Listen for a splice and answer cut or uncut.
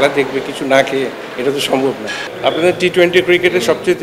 cut